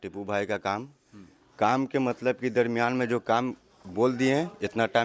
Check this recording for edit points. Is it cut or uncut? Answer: uncut